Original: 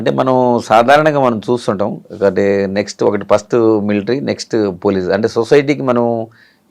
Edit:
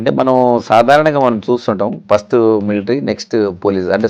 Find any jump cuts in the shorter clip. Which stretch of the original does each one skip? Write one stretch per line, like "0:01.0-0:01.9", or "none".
0:02.0-0:03.2